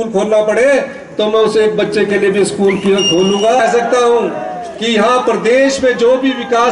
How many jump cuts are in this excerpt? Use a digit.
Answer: 0